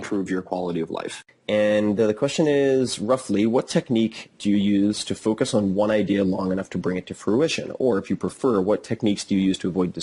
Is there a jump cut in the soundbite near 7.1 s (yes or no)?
no